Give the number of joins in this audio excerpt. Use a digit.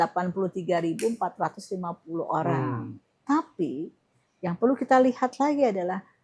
1